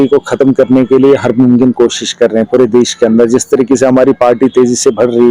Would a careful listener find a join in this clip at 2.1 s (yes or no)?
no